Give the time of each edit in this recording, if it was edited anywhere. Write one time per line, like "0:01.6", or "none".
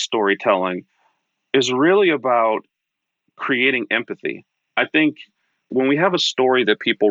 0:05.6

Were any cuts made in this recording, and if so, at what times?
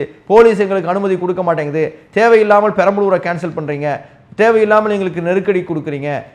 none

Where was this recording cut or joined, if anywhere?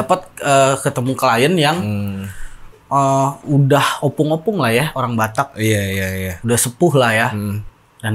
none

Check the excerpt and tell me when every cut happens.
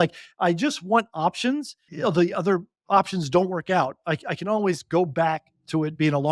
0:01.9

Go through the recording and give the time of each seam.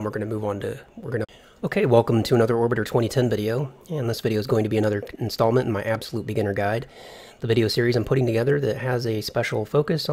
none

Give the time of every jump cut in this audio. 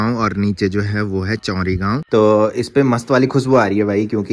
0:02.1

